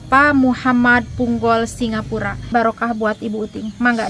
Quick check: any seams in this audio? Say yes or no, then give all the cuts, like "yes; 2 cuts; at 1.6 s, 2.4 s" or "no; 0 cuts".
yes; 1 cut; at 2.5 s